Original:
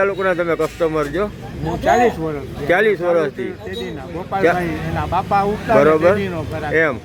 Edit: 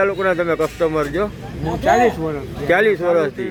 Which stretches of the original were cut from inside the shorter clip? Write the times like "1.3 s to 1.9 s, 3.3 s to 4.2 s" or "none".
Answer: none